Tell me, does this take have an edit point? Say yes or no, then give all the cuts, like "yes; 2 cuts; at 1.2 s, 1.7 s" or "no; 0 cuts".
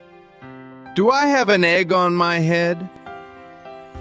yes; 2 cuts; at 0.9 s, 2.9 s